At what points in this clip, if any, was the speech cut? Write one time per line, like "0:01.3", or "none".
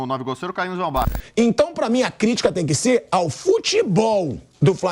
0:01.2